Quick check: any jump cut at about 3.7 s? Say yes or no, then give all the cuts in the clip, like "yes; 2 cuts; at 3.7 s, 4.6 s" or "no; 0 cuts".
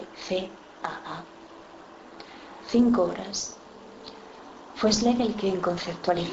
yes; 1 cut; at 3.7 s